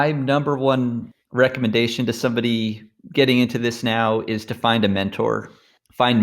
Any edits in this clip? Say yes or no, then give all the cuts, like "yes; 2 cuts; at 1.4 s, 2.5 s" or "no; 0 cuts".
yes; 1 cut; at 1.1 s